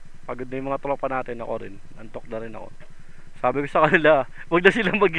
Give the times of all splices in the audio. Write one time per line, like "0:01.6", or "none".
none